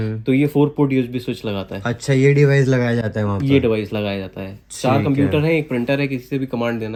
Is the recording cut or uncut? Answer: uncut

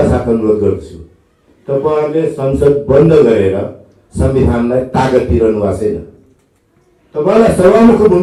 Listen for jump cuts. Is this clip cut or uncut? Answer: uncut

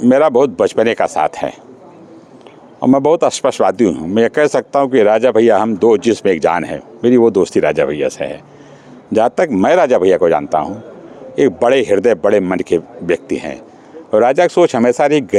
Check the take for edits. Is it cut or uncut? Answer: uncut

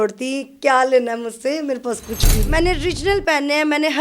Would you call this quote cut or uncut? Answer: cut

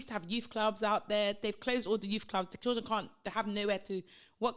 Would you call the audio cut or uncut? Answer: uncut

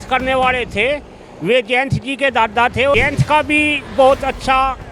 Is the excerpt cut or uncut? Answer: cut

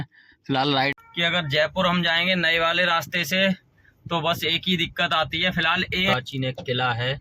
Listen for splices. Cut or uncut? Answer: cut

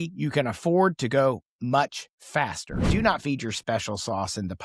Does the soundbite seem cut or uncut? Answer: cut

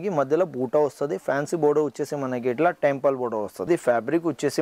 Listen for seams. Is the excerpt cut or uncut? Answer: cut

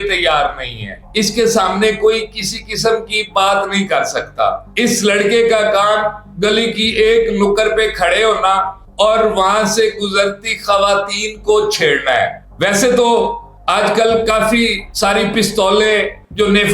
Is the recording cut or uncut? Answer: uncut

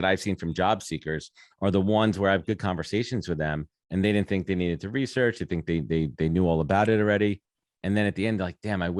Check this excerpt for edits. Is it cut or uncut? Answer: uncut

